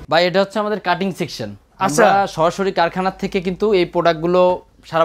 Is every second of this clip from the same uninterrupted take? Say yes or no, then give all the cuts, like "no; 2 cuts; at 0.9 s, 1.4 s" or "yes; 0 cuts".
yes; 0 cuts